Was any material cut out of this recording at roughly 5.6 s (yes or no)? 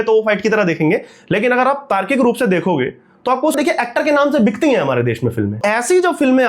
yes